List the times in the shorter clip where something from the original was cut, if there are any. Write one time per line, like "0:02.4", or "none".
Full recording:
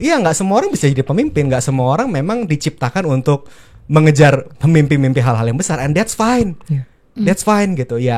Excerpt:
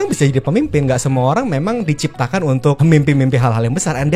0:02.8